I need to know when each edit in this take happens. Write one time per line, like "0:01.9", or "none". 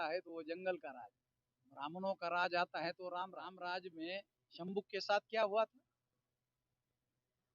0:03.5